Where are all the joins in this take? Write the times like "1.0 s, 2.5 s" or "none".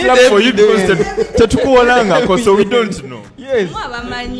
none